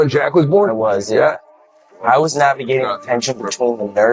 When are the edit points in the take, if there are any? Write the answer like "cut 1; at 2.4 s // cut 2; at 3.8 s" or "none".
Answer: none